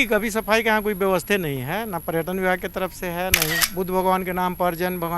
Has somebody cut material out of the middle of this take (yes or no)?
yes